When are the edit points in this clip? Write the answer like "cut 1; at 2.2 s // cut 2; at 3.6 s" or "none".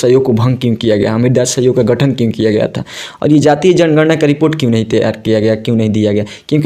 none